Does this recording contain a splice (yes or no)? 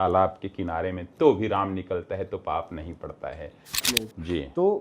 yes